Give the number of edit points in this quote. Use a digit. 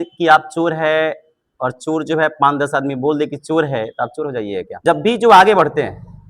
1